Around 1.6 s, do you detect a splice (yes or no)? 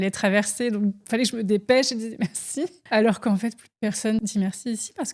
no